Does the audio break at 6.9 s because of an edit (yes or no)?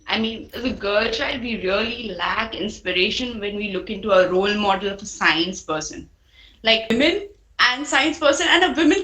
yes